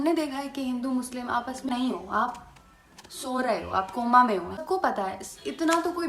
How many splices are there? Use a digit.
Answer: 2